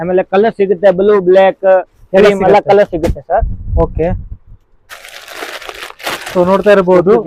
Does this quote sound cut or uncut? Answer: uncut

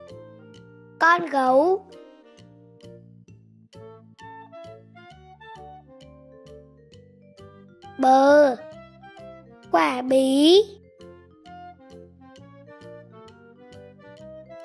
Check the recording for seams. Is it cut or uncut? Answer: uncut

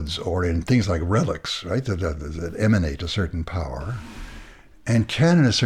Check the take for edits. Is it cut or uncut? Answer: uncut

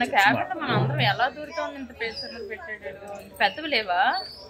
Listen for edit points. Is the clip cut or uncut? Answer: uncut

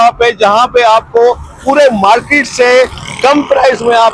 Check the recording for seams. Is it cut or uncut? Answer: uncut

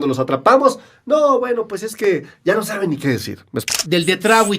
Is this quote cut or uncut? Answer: cut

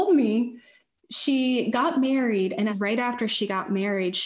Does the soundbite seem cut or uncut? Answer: cut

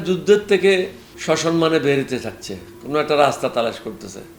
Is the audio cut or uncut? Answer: cut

